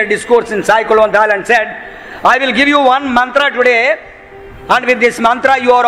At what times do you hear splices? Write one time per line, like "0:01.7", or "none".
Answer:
none